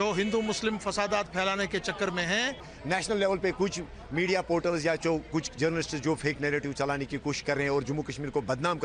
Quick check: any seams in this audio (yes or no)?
yes